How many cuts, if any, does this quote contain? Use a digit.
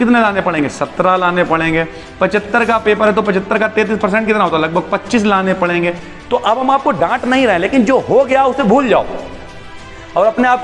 1